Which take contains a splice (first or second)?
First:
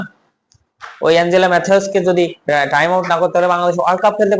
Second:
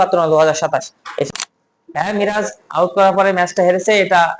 second